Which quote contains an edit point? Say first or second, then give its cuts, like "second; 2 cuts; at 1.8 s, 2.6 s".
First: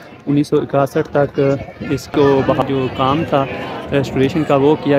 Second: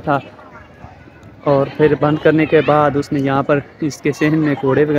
first; 1 cut; at 2.6 s